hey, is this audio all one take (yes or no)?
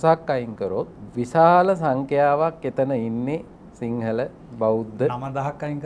no